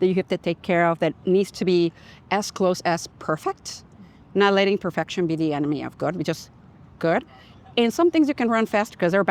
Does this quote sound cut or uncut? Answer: uncut